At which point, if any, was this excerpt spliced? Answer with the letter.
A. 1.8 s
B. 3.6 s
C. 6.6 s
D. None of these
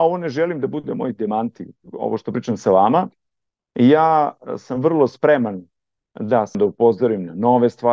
C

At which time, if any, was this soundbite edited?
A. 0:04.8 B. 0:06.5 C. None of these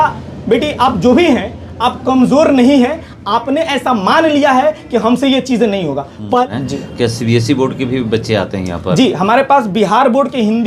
B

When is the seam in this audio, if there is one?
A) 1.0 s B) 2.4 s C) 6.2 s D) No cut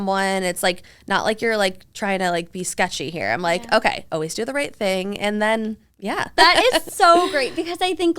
C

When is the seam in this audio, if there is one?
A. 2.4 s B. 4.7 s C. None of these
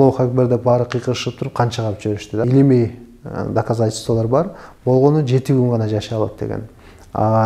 A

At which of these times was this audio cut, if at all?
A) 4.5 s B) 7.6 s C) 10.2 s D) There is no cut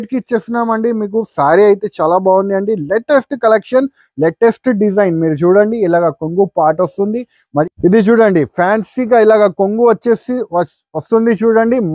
B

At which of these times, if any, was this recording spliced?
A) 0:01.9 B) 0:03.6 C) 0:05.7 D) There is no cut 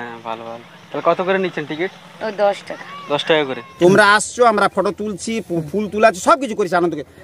B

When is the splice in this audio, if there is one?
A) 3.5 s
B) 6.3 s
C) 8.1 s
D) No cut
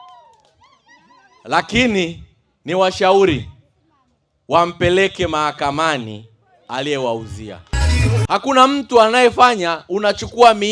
C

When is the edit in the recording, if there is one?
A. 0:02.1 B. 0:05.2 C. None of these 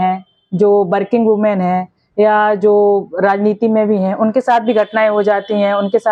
C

